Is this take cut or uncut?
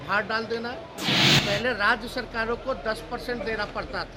cut